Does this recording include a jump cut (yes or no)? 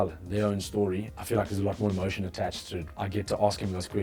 yes